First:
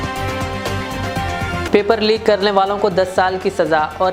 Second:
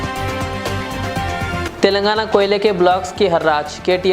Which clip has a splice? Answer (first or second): second